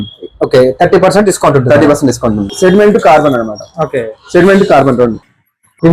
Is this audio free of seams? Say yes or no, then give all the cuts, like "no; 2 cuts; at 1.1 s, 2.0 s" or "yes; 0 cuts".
no; 1 cut; at 2.5 s